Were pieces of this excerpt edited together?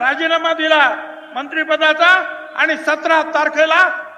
no; 0 cuts

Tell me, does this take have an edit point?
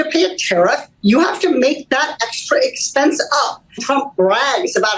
yes; 1 cut; at 3.8 s

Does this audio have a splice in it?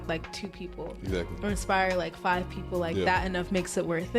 no; 0 cuts

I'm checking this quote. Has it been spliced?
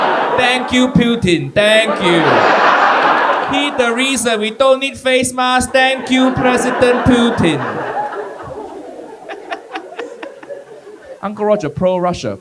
yes; 1 cut; at 11.2 s

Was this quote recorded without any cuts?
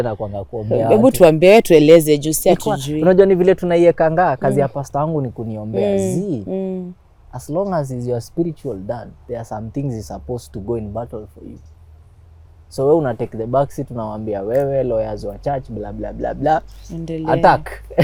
yes; 0 cuts

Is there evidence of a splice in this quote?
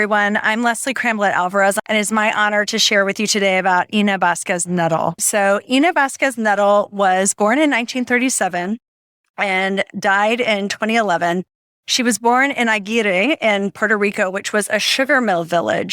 yes; 3 cuts; at 1.8 s, 5.2 s, 9.9 s

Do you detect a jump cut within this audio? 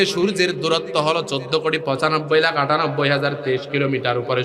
no; 0 cuts

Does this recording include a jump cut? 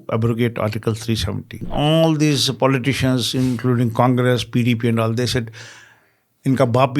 yes; 1 cut; at 1.7 s

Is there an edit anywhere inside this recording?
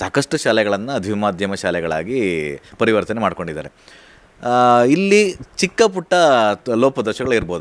no; 0 cuts

